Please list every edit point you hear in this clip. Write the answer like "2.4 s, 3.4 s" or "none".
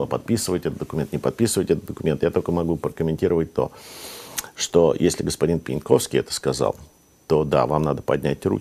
none